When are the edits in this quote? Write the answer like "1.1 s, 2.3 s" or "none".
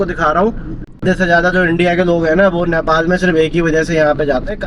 1.0 s

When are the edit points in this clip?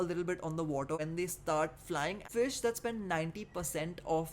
1.0 s, 2.2 s

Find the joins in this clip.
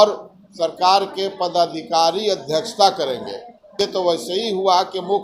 3.8 s

